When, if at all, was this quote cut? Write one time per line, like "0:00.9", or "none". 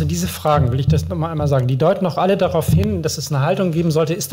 none